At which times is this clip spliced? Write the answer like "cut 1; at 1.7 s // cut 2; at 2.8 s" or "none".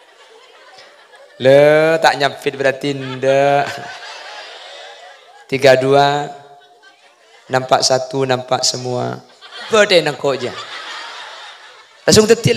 cut 1; at 9.7 s